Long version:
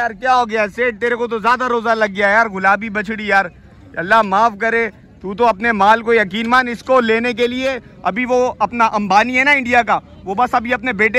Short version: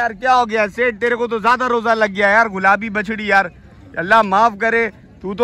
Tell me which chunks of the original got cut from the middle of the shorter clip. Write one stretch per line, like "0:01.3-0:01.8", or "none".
none